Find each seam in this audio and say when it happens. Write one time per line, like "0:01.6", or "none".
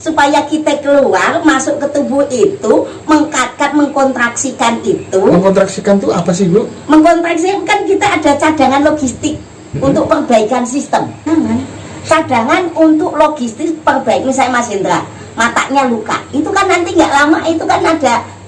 0:11.3